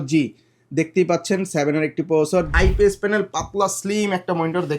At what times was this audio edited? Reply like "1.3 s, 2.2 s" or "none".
2.5 s